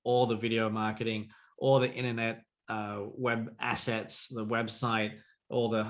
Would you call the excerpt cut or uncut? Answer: uncut